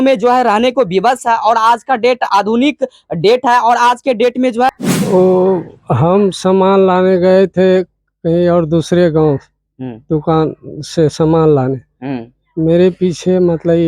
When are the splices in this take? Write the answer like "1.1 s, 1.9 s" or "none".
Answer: 4.7 s